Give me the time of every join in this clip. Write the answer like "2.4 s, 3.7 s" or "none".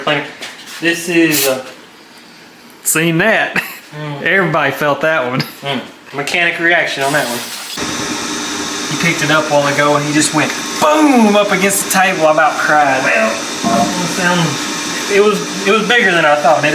6.0 s, 7.8 s